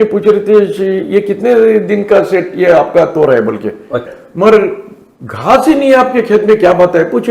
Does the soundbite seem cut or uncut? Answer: cut